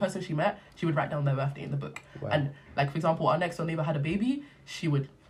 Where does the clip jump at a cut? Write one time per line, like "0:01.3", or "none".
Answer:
none